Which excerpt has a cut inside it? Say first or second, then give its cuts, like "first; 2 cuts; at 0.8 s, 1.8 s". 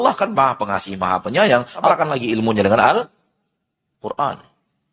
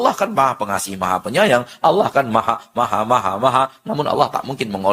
first; 1 cut; at 1.9 s